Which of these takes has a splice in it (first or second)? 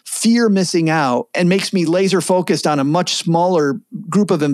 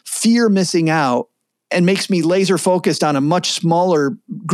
first